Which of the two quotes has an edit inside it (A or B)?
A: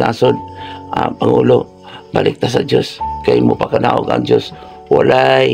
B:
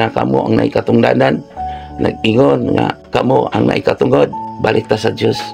B